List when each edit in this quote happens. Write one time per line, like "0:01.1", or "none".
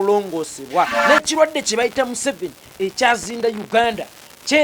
0:01.0